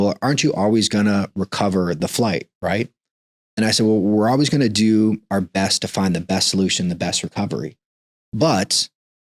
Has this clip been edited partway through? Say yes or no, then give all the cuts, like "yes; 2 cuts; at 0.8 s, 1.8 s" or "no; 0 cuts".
no; 0 cuts